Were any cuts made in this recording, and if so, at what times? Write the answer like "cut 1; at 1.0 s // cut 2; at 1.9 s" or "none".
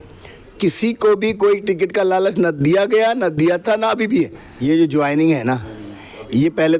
cut 1; at 4.4 s